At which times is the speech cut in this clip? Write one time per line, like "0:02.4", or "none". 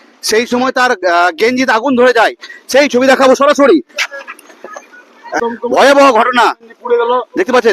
0:05.4